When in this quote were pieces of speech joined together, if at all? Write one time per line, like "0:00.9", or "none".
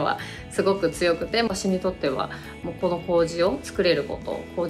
0:01.5